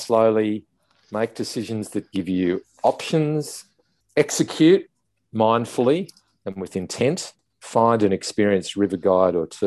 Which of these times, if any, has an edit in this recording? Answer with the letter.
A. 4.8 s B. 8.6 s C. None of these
C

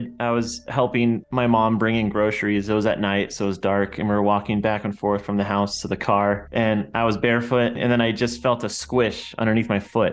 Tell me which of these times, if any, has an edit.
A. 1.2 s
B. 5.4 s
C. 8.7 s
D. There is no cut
A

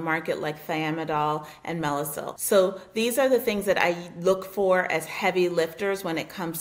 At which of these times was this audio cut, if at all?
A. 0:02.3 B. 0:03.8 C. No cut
A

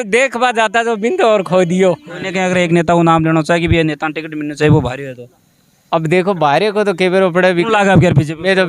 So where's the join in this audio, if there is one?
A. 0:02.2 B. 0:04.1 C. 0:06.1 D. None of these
A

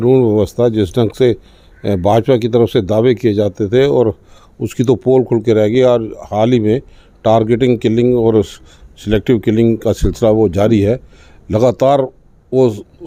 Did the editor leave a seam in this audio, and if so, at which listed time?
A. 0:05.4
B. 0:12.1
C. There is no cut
C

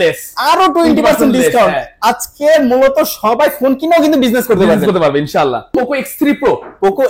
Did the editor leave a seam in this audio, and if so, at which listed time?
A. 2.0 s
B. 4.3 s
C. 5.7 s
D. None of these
C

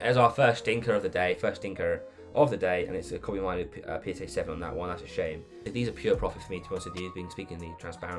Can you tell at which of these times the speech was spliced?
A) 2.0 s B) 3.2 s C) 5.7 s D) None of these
C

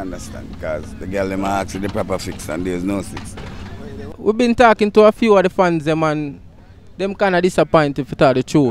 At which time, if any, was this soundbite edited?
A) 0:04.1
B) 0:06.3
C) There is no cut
A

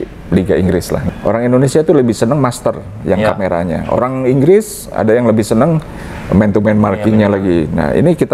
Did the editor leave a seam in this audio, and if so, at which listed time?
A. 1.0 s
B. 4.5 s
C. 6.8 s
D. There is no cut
A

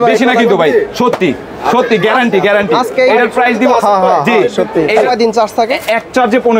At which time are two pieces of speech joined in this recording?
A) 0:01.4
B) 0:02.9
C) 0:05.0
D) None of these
C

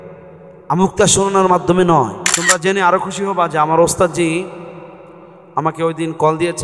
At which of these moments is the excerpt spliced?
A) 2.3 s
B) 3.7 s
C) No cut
A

